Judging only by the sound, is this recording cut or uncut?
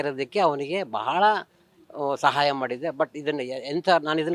uncut